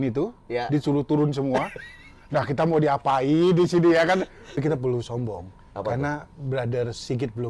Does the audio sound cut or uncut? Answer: cut